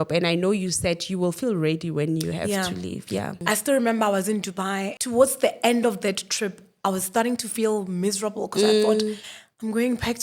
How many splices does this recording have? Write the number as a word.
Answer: two